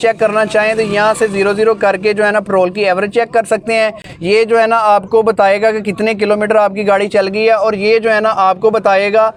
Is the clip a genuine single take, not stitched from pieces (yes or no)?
yes